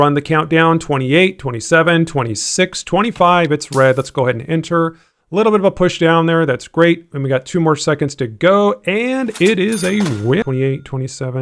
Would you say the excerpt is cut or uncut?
cut